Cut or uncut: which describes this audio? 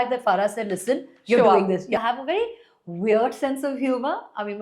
cut